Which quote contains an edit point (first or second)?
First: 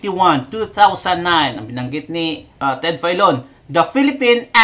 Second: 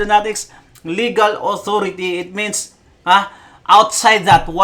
first